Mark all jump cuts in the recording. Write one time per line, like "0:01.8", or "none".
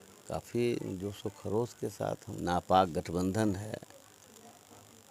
0:02.3